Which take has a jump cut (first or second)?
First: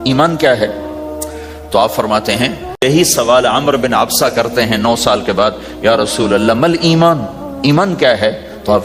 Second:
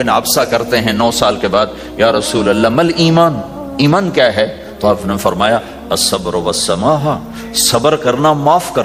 first